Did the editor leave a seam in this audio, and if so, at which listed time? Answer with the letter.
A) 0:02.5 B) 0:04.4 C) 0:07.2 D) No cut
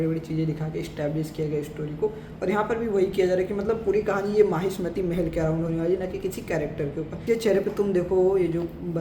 C